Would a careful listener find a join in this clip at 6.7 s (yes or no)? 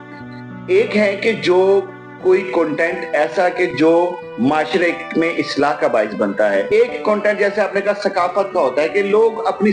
yes